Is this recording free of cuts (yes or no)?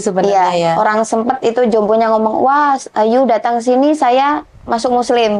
yes